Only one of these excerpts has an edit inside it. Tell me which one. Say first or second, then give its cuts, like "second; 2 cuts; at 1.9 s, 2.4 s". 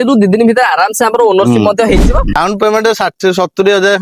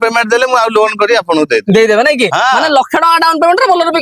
first; 1 cut; at 2.4 s